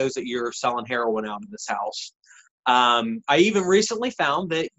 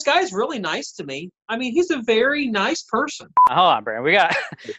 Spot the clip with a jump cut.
second; 1 cut; at 3.5 s

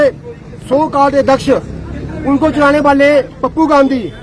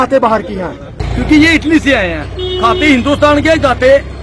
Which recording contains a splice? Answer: second; 1 cut; at 0.9 s

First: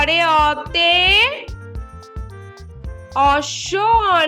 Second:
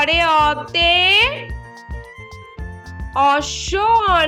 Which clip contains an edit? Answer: first; 2 cuts; at 1.5 s, 3.1 s

